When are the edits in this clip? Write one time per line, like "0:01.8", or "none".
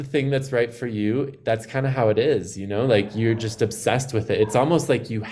none

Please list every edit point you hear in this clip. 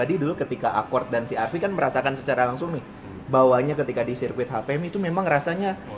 none

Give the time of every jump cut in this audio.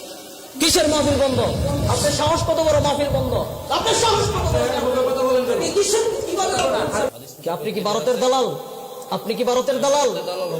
0:07.1

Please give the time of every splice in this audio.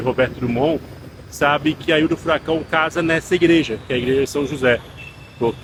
none

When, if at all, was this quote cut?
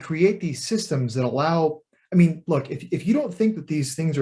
none

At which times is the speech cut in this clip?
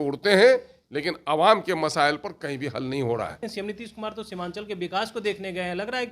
0:03.4

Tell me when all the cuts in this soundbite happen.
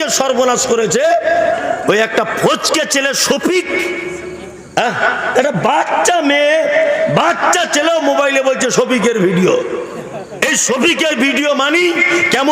0:01.6

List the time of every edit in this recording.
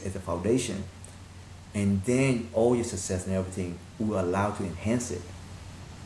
none

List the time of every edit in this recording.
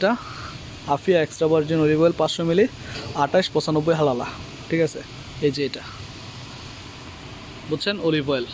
none

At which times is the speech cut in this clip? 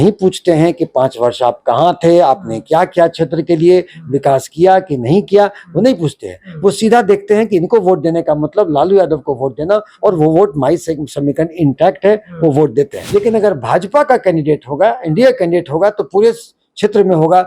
0:13.0

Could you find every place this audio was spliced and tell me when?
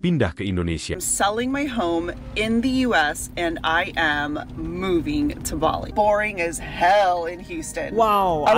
0:01.1
0:05.8

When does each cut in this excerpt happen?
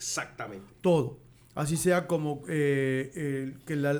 none

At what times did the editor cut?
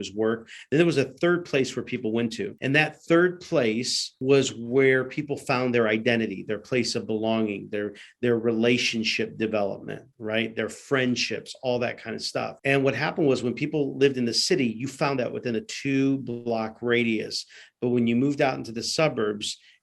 0:02.5
0:04.2
0:12.5

